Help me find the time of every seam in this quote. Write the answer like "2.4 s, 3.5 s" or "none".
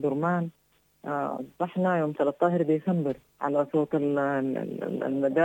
3.3 s